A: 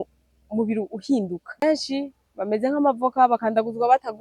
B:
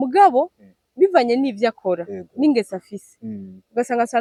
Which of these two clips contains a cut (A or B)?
A